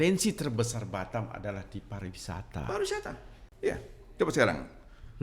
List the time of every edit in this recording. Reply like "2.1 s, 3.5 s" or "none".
3.4 s